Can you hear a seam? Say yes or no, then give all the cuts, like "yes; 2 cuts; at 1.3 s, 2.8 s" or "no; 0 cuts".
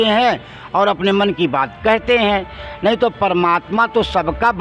no; 0 cuts